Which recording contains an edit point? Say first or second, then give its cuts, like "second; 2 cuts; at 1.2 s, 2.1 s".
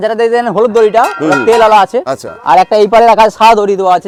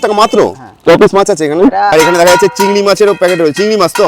second; 1 cut; at 1.9 s